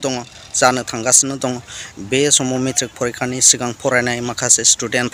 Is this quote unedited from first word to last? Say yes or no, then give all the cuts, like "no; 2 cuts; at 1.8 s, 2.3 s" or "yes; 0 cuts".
yes; 0 cuts